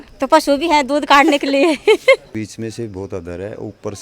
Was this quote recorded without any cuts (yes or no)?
no